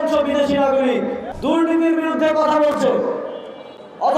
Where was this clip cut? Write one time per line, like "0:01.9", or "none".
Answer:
0:01.2